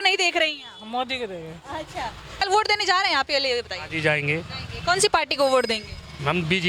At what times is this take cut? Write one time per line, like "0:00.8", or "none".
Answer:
0:02.5

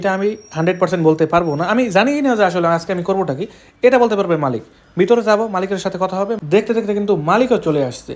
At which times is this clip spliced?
0:06.4

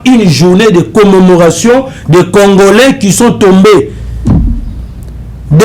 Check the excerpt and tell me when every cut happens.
none

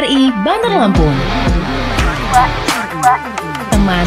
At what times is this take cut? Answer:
none

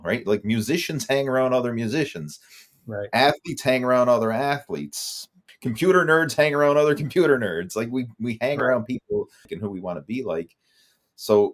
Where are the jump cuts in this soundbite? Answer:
0:05.5
0:09.5

